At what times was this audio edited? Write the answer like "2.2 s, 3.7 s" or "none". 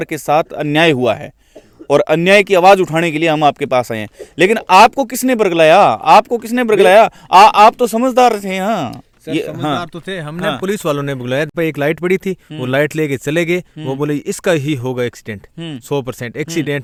none